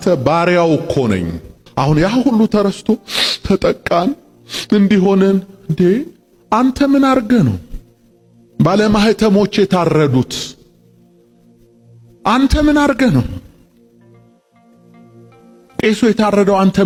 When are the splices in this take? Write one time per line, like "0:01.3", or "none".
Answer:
none